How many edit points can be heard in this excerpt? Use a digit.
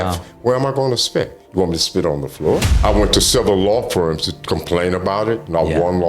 1